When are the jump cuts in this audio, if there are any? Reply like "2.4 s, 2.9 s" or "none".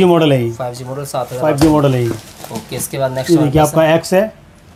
none